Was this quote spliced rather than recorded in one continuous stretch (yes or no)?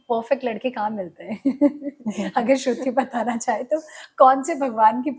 no